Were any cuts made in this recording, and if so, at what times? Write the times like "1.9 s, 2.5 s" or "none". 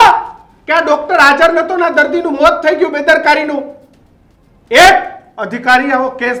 none